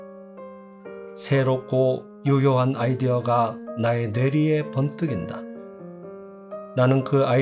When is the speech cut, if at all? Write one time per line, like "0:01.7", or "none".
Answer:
0:01.3
0:05.2
0:06.5